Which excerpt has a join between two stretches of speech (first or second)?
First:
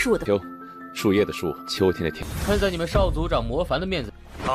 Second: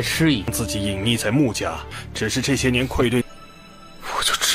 first